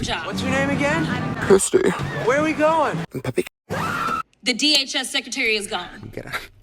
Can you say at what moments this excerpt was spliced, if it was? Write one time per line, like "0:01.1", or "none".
none